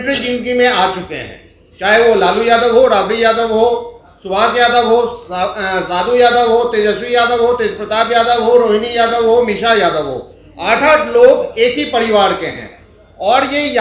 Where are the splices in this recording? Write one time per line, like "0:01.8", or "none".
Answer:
none